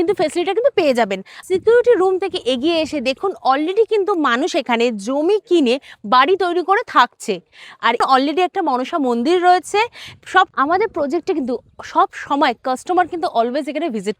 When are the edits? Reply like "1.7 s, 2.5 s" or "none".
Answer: 1.3 s, 8.0 s, 10.5 s